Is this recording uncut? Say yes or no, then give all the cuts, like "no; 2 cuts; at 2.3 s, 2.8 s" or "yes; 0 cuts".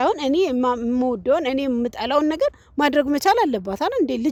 yes; 0 cuts